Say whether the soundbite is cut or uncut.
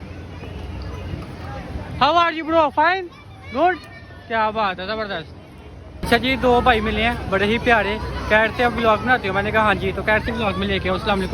cut